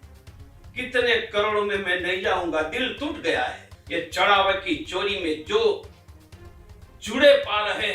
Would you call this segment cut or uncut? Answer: cut